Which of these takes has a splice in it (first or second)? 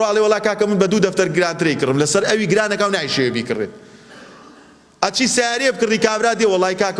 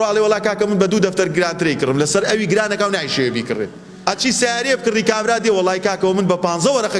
second